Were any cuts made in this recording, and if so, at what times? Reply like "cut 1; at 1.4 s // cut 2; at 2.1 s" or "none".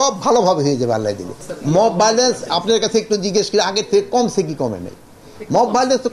cut 1; at 1.4 s